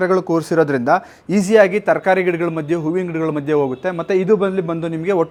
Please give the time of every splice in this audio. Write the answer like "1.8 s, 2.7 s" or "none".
none